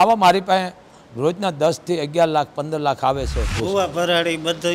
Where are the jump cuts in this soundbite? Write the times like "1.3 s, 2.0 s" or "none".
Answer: 3.4 s